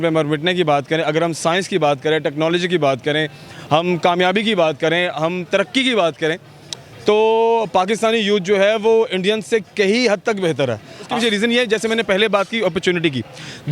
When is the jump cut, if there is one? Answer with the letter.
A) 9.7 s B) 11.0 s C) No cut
B